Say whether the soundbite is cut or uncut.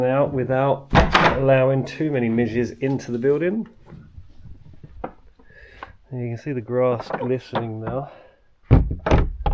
uncut